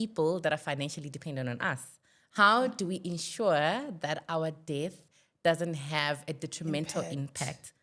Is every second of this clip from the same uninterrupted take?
yes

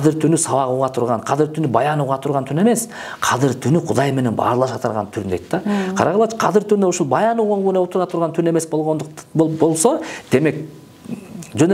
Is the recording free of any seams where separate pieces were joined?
yes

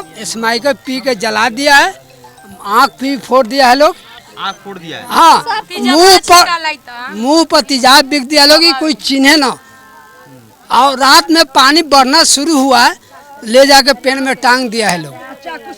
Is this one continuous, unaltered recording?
yes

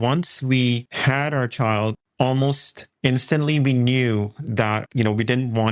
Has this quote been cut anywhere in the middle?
yes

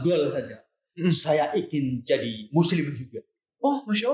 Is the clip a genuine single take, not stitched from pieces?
yes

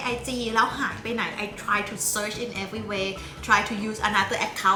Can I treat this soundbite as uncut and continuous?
yes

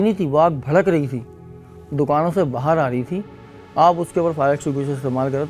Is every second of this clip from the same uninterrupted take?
yes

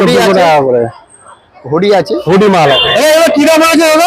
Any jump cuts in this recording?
yes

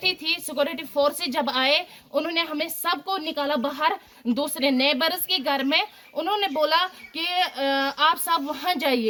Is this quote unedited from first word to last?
yes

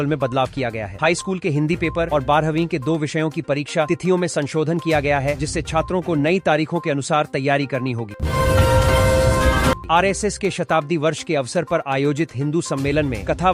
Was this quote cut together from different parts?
no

